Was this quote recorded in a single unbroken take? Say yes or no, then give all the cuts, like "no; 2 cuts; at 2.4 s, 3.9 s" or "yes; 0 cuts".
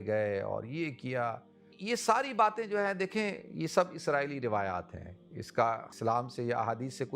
no; 1 cut; at 1.8 s